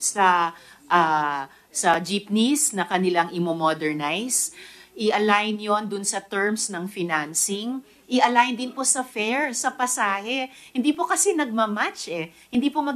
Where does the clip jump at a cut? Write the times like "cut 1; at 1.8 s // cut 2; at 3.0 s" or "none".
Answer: none